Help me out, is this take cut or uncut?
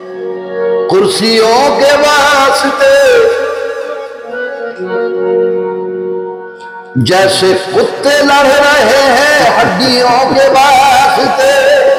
uncut